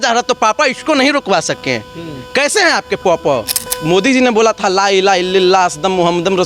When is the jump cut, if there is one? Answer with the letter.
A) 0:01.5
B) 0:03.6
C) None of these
B